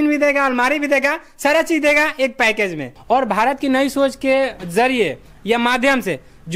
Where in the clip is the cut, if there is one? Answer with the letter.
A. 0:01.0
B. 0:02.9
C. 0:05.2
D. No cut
B